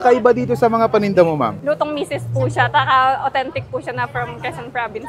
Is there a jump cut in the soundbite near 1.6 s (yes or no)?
yes